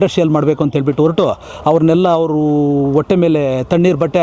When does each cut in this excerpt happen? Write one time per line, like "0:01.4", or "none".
none